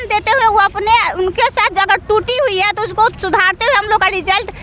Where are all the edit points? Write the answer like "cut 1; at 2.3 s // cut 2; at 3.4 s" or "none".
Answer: none